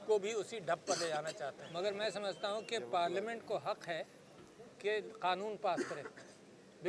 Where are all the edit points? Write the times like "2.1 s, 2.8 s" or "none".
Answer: none